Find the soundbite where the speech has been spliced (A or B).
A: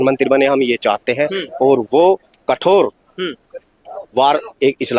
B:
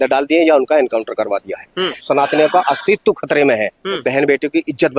B